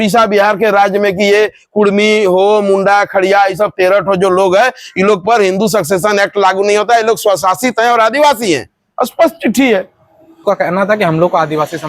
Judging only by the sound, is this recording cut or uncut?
cut